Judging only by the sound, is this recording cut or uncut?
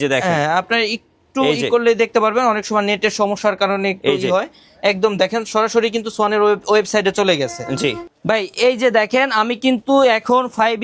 cut